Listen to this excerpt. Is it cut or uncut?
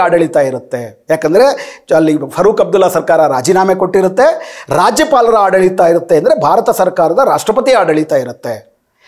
uncut